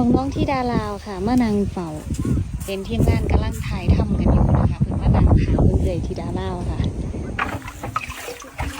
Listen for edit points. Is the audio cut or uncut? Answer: cut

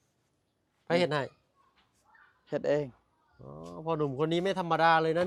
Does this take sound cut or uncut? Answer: uncut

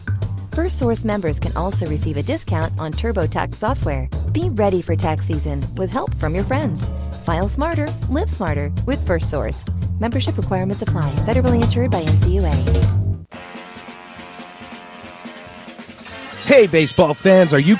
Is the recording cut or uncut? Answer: cut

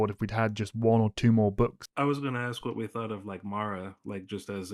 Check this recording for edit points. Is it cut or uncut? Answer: cut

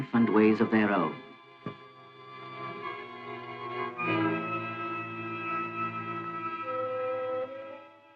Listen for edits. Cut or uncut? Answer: uncut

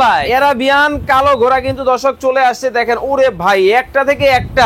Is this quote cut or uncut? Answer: uncut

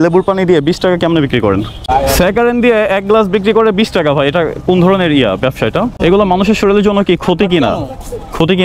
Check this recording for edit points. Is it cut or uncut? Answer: cut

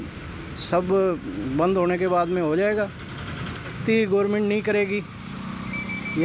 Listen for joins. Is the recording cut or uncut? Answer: cut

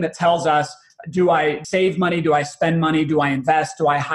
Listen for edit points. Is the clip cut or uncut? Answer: cut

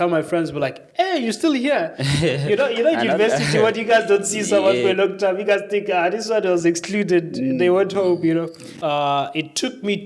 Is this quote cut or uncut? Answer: cut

